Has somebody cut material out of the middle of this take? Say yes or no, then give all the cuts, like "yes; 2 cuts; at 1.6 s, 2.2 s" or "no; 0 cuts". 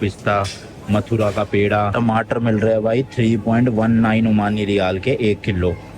yes; 1 cut; at 1.9 s